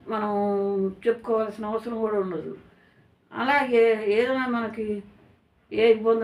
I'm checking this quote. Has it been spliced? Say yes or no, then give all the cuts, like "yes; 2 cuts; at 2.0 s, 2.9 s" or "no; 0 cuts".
no; 0 cuts